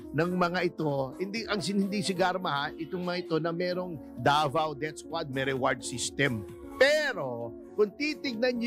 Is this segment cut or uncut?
uncut